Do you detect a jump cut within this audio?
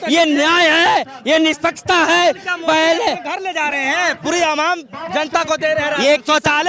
no; 0 cuts

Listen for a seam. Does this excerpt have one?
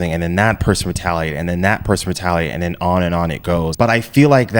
yes; 1 cut; at 3.7 s

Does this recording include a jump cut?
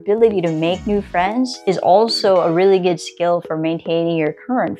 no; 0 cuts

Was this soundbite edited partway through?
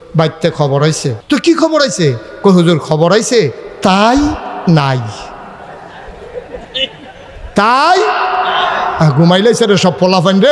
yes; 1 cut; at 1.1 s

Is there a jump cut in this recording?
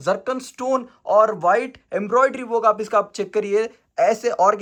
no; 0 cuts

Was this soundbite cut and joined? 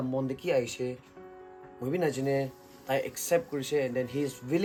no; 0 cuts

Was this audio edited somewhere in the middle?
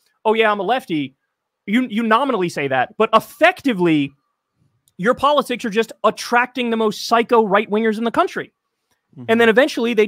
no; 0 cuts

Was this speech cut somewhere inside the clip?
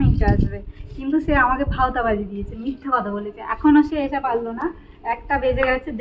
no; 0 cuts

